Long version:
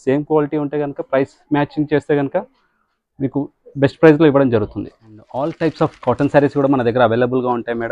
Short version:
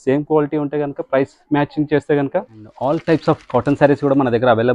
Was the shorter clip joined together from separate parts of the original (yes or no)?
yes